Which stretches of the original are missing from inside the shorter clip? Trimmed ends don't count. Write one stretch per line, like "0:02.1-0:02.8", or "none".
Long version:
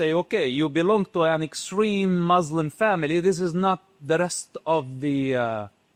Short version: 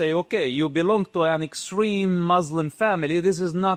none